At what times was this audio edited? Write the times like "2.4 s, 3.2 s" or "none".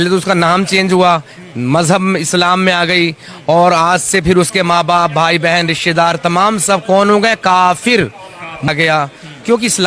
8.7 s